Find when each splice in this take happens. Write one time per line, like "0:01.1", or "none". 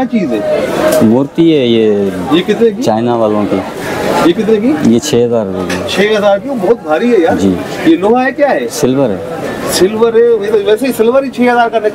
none